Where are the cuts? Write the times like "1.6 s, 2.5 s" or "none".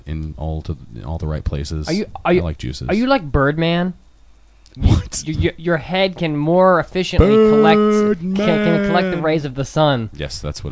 none